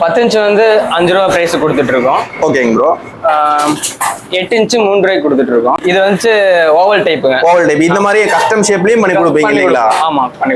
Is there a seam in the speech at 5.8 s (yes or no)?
yes